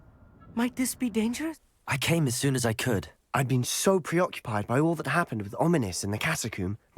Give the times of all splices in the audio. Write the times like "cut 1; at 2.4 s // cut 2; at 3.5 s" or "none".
cut 1; at 1.7 s